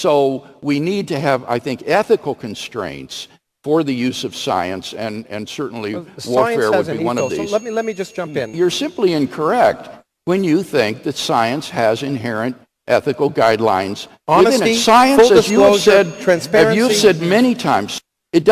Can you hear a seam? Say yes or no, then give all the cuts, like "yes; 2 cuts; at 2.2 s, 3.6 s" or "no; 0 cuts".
yes; 1 cut; at 6.9 s